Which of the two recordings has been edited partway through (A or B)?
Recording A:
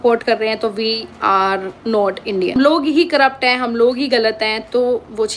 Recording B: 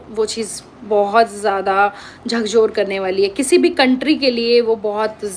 A